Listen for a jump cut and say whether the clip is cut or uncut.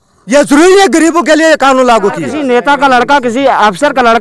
cut